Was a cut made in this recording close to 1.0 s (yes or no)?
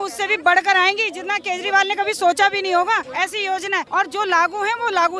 no